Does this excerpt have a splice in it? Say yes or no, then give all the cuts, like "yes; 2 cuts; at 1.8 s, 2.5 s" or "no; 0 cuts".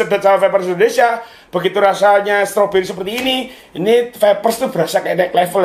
no; 0 cuts